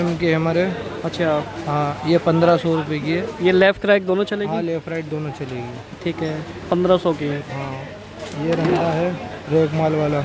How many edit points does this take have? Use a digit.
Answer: 0